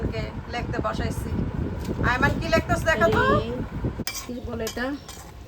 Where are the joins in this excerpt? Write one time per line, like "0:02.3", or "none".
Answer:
0:04.0